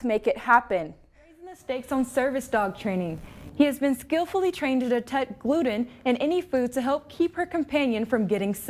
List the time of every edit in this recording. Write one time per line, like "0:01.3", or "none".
0:01.5